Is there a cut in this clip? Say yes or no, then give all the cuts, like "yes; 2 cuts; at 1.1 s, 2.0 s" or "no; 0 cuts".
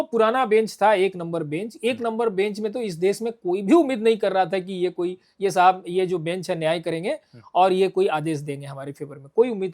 no; 0 cuts